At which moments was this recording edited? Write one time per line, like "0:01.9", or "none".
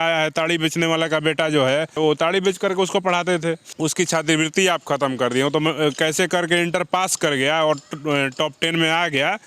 0:02.0
0:03.7